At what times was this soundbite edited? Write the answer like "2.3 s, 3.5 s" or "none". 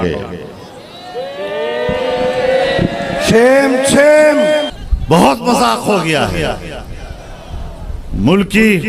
4.7 s